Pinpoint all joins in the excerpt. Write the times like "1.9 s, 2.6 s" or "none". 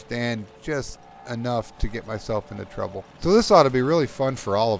3.1 s